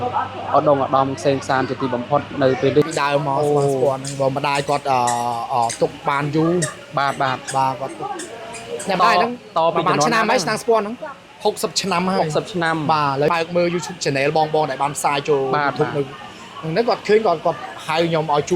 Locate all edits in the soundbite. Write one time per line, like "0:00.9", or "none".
0:02.9
0:13.3